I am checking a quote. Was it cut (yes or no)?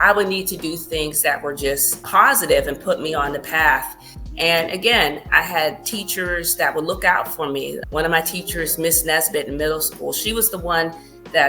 yes